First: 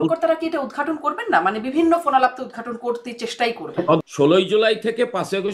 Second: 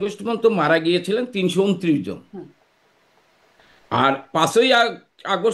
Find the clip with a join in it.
first; 1 cut; at 4.0 s

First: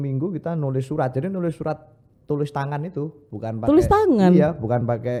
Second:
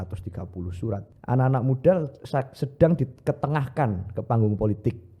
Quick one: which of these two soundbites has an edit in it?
second; 1 cut; at 1.1 s

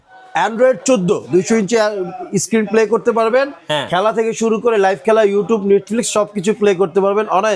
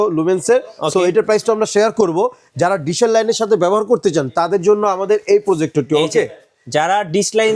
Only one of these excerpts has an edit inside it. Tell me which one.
first; 1 cut; at 1.2 s

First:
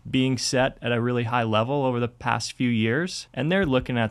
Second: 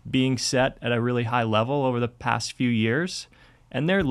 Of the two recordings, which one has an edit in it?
first; 1 cut; at 3.2 s

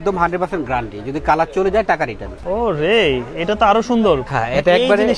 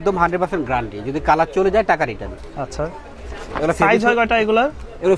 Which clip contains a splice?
first; 2 cuts; at 2.3 s, 4.2 s

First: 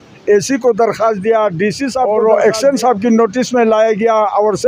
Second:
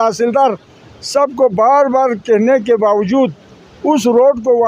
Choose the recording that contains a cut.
first; 1 cut; at 2.1 s

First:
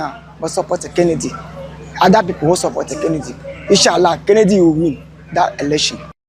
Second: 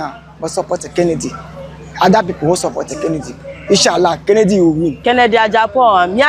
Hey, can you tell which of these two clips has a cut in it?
second; 1 cut; at 5.0 s

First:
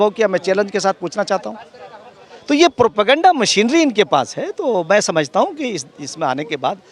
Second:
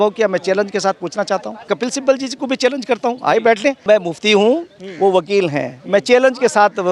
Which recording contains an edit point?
second; 2 cuts; at 1.7 s, 3.8 s

